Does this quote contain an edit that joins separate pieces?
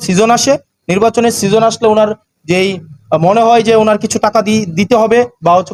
no; 0 cuts

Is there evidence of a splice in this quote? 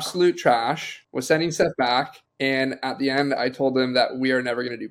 no; 0 cuts

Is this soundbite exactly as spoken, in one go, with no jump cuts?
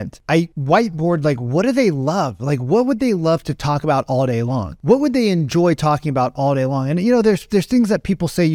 yes; 0 cuts

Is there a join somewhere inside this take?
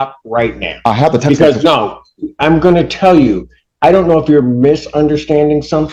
no; 0 cuts

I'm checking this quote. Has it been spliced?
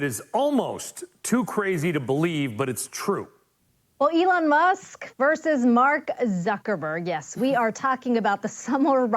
yes; 1 cut; at 3.6 s

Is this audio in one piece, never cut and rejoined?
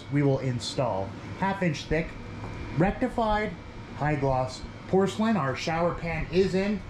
yes; 0 cuts

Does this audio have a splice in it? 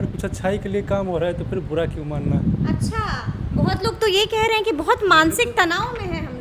no; 0 cuts

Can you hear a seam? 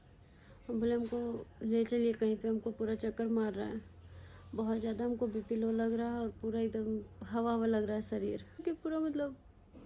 yes; 1 cut; at 8.6 s

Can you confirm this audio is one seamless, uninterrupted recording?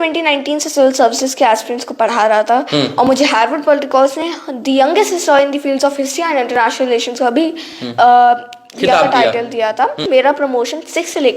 no; 1 cut; at 10.0 s

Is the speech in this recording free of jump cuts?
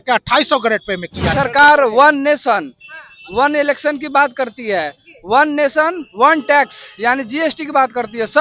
no; 1 cut; at 1.3 s

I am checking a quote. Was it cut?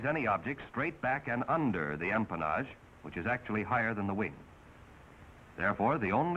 yes; 1 cut; at 1.6 s

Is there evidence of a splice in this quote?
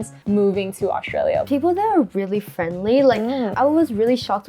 yes; 1 cut; at 1.4 s

